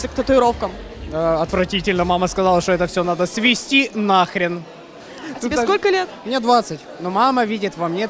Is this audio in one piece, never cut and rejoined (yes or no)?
yes